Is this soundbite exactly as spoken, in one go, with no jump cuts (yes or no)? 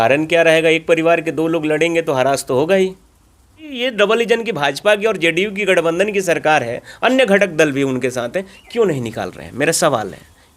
no